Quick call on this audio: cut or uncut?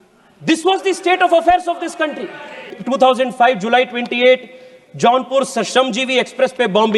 cut